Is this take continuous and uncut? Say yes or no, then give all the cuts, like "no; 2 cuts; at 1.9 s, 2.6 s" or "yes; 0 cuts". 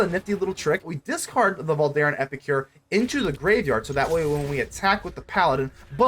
no; 1 cut; at 0.9 s